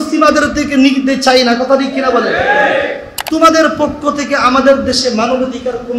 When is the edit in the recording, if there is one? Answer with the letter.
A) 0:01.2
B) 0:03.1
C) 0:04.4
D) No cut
B